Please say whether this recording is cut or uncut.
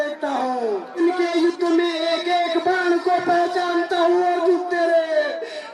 cut